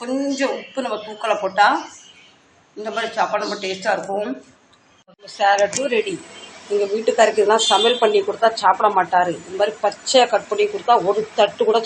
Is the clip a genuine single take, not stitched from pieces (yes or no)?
no